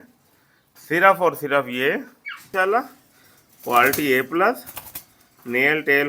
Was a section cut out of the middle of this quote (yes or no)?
yes